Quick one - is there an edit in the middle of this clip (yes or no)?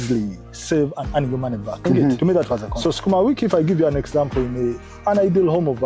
yes